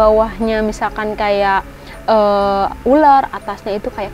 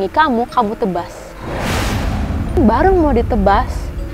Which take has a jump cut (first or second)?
second